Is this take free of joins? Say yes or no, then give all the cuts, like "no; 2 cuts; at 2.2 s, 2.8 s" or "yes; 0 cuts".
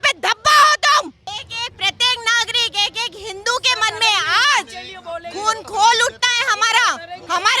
no; 1 cut; at 1.2 s